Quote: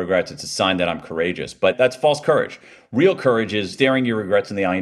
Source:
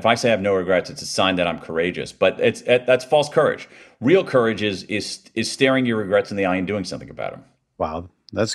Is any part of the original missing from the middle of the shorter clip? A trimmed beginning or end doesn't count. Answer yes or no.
yes